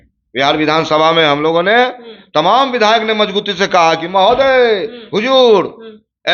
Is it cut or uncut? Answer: uncut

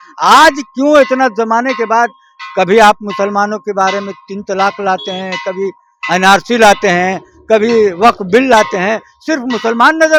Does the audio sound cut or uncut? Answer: uncut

